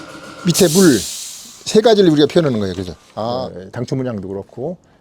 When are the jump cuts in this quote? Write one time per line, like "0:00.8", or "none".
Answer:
0:03.3